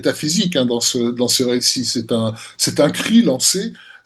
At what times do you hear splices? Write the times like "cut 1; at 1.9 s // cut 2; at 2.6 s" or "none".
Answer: none